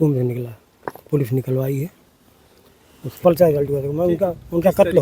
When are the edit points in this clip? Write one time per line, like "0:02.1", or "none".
0:03.2